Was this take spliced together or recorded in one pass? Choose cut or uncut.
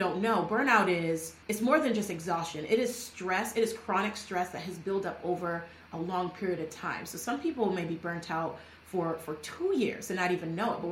uncut